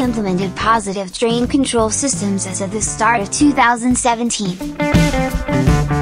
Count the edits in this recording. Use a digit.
1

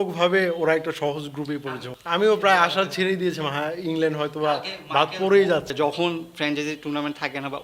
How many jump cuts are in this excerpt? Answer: 2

